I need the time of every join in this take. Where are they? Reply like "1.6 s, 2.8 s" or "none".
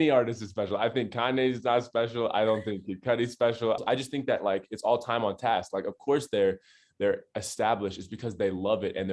3.8 s

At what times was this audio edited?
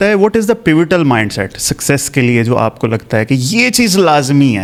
none

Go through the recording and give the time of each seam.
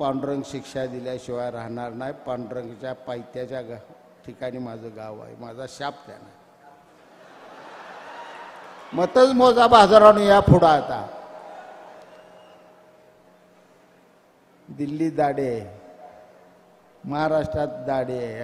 none

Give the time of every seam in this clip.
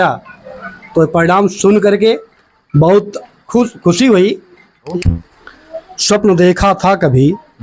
4.9 s

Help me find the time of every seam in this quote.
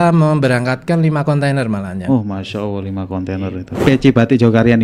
3.8 s

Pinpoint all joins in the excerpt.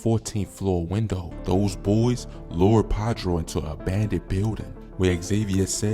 1.3 s

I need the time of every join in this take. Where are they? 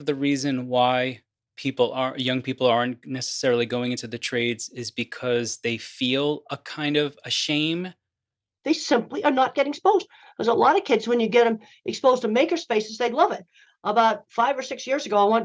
8.1 s

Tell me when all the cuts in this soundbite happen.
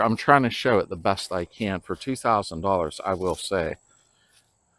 1.2 s

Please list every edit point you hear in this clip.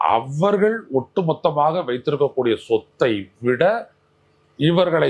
none

